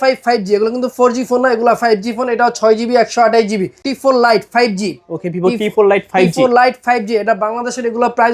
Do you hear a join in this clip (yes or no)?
yes